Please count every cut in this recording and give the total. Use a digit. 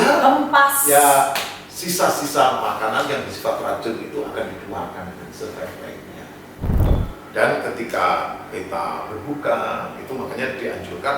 1